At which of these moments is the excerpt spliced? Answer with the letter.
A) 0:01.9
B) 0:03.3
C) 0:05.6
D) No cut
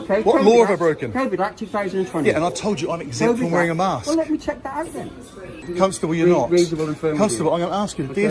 C